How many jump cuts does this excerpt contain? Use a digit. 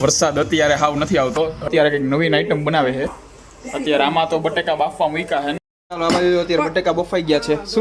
2